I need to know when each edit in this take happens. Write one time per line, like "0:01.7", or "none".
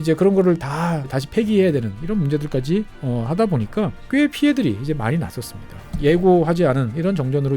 0:01.2
0:03.0
0:04.0
0:05.9